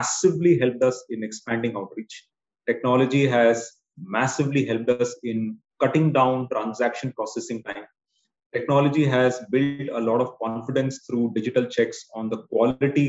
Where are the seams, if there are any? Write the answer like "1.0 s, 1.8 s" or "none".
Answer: none